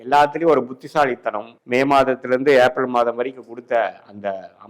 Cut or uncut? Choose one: cut